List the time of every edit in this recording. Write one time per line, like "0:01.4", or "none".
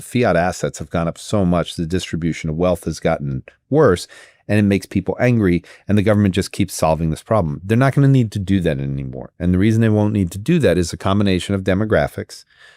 none